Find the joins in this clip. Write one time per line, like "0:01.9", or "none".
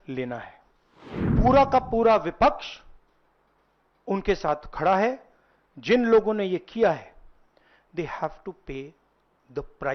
0:01.3

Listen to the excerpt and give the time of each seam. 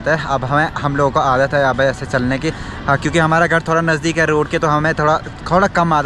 none

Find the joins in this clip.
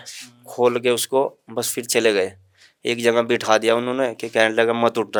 none

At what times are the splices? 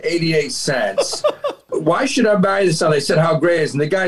0:01.7

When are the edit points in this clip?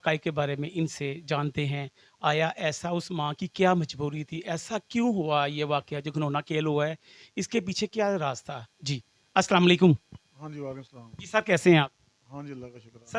none

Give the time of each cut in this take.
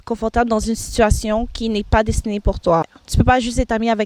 0:03.0

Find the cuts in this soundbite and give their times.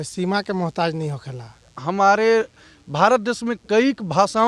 0:01.8

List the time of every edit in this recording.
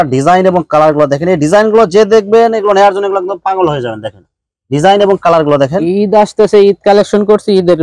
none

